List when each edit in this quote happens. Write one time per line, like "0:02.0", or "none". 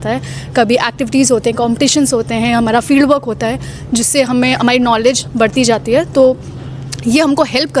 none